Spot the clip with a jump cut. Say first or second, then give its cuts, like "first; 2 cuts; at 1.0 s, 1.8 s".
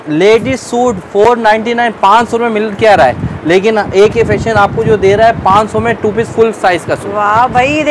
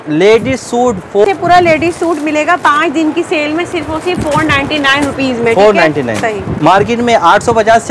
second; 2 cuts; at 1.2 s, 6.5 s